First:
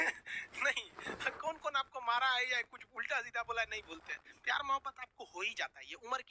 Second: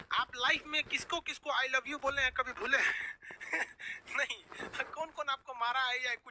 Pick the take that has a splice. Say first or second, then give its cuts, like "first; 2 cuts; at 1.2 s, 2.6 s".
first; 1 cut; at 3.9 s